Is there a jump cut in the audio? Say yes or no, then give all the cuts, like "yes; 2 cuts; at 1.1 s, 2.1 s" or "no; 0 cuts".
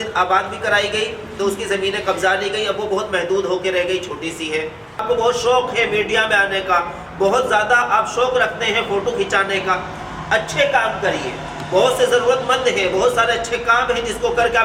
yes; 1 cut; at 5.0 s